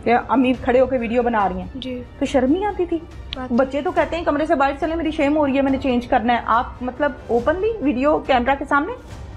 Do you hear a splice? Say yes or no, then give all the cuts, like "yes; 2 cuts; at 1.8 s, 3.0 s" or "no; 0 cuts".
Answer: no; 0 cuts